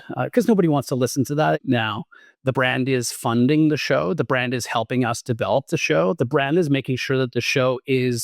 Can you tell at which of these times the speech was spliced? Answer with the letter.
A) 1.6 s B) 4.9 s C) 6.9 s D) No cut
A